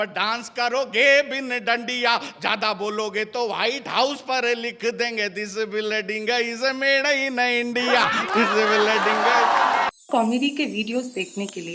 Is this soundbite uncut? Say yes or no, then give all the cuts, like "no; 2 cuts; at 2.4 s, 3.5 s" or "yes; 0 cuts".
no; 1 cut; at 9.9 s